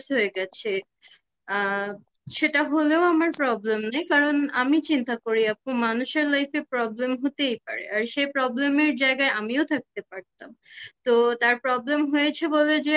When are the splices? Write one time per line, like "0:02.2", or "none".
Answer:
none

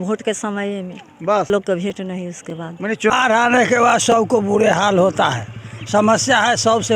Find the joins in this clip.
0:01.5
0:03.1

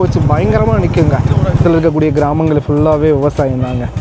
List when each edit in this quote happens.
0:01.6

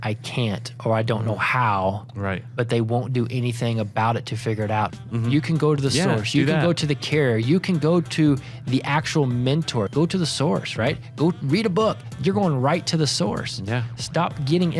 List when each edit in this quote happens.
0:04.9
0:09.9

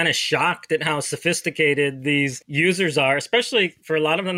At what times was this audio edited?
0:02.4

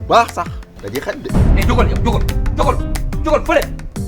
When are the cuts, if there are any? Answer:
0:01.1

